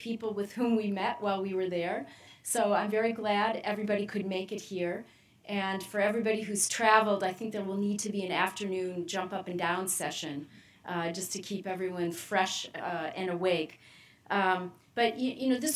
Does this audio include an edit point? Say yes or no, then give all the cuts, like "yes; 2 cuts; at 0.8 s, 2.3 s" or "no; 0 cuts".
yes; 1 cut; at 7.8 s